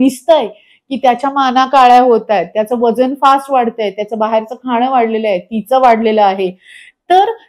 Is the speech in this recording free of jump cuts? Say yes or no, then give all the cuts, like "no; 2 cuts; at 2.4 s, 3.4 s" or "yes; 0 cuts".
yes; 0 cuts